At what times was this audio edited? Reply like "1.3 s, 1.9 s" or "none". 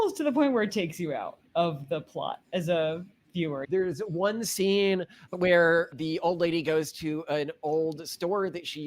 3.6 s, 5.2 s